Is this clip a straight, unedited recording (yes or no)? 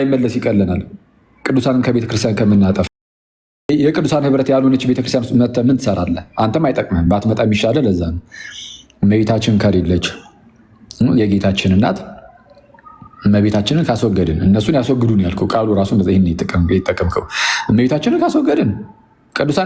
yes